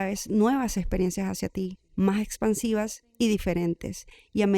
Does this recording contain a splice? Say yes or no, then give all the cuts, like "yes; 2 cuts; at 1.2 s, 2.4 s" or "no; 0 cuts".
yes; 2 cuts; at 1.8 s, 3.0 s